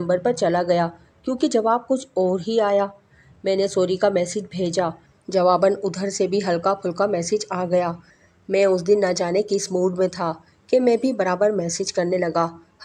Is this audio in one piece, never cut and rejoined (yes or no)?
yes